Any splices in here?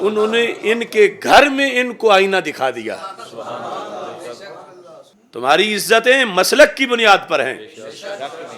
yes; 1 cut; at 5.0 s

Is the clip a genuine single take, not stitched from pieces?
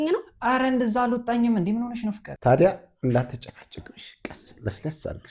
no; 1 cut; at 2.3 s

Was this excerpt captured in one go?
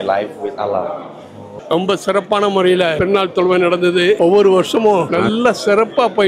no; 4 cuts; at 1.5 s, 3.0 s, 4.2 s, 5.1 s

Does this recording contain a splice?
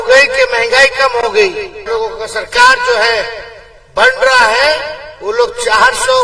yes; 1 cut; at 1.8 s

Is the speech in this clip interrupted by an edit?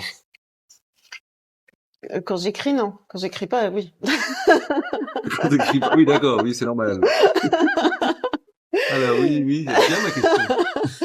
no; 0 cuts

